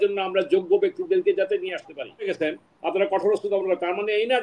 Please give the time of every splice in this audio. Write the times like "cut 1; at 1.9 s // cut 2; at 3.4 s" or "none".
cut 1; at 2.3 s